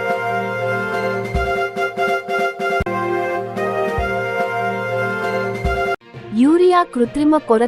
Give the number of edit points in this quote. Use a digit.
3